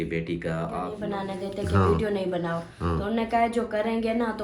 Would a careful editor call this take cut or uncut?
cut